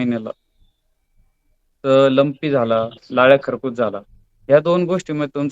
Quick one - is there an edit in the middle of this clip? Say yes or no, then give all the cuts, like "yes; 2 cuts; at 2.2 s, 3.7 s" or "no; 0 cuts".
no; 0 cuts